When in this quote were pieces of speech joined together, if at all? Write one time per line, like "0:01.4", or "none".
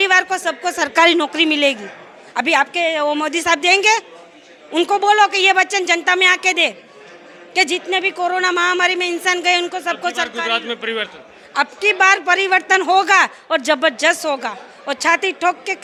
none